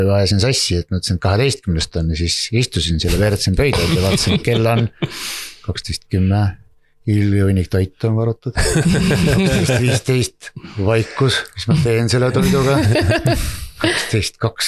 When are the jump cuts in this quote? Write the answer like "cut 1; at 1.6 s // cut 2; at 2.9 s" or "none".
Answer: none